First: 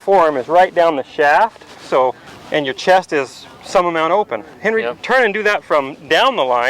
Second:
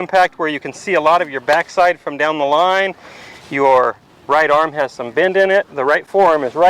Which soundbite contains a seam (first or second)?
first